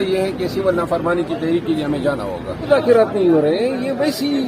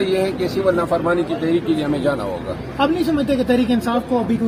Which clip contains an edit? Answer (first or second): first